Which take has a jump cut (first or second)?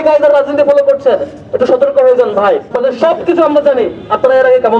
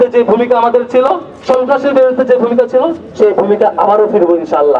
first